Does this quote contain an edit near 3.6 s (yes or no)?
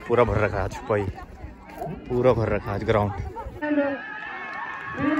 yes